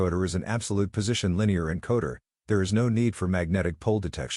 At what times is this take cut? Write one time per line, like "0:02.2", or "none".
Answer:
none